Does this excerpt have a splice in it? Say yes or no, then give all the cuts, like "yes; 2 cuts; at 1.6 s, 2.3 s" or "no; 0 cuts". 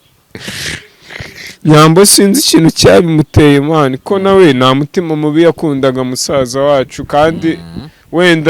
no; 0 cuts